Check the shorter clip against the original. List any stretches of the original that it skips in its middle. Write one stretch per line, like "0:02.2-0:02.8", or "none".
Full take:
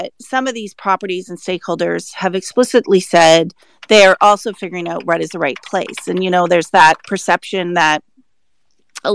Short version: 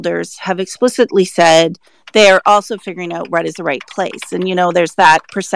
none